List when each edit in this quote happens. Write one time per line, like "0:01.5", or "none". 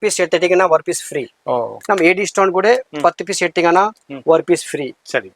0:01.7